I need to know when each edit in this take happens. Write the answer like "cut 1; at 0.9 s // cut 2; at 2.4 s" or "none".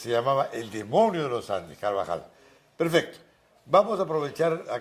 none